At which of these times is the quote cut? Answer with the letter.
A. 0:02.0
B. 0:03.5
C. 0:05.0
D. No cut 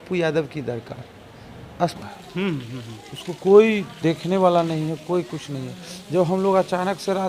A